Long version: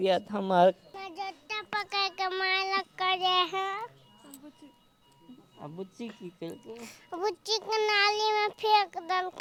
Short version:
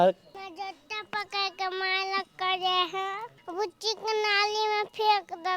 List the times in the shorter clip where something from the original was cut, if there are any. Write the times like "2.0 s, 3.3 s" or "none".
3.3 s